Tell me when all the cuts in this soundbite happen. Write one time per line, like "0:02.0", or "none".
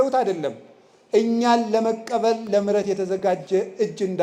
none